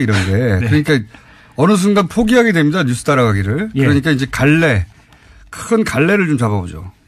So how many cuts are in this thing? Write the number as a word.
one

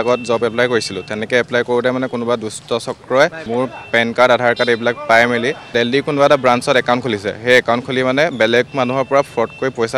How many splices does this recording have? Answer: two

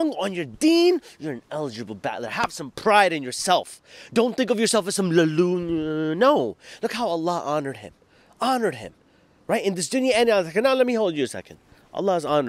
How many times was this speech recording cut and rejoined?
zero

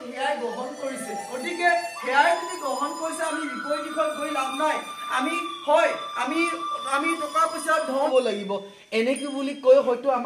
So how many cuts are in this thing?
one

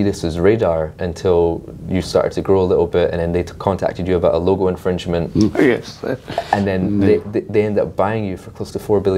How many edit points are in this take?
zero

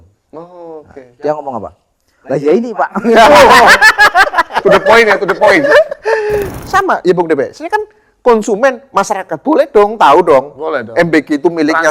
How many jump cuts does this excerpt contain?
one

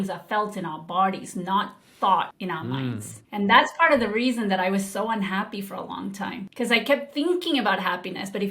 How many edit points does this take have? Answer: two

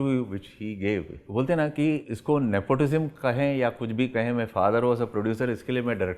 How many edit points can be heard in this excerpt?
two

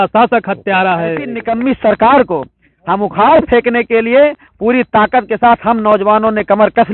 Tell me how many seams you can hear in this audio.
one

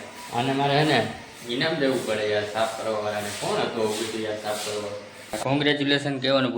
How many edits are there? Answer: two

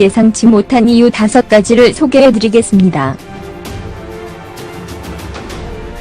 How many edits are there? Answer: two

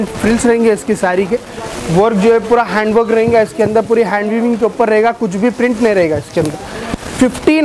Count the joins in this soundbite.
zero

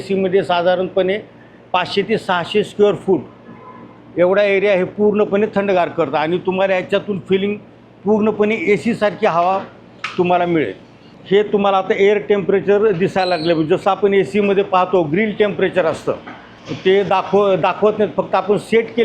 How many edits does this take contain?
zero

